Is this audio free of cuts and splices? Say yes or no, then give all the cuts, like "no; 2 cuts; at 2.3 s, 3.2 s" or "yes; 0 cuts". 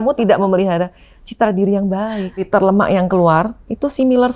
no; 1 cut; at 2.4 s